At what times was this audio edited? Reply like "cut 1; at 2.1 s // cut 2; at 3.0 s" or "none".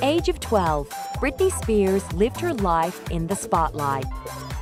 none